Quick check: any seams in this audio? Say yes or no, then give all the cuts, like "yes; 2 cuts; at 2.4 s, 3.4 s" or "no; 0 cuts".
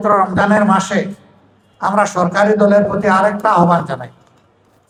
no; 0 cuts